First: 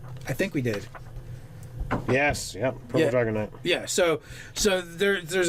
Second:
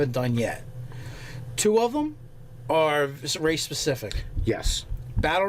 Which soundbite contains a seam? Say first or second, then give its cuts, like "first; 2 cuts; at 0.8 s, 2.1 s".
second; 1 cut; at 1.8 s